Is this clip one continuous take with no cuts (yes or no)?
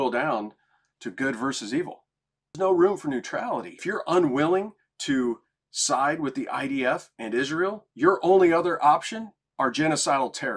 no